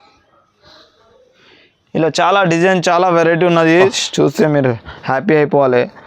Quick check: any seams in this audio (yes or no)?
yes